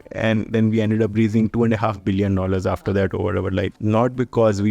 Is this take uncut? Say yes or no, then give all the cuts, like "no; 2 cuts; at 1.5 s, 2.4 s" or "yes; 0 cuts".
no; 1 cut; at 3.8 s